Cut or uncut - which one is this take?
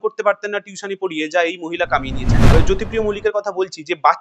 cut